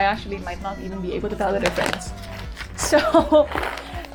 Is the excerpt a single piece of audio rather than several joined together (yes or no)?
yes